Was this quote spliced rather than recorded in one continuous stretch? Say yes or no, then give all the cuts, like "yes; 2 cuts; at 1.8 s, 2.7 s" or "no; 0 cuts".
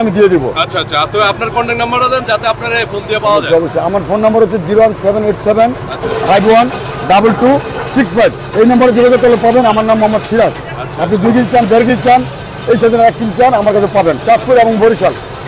no; 0 cuts